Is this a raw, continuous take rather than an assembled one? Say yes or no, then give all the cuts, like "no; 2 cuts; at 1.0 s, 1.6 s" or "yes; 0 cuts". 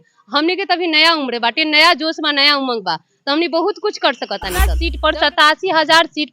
no; 1 cut; at 4.8 s